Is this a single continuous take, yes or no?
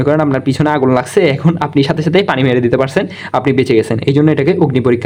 yes